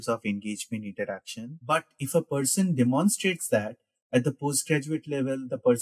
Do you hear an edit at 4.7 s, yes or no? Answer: no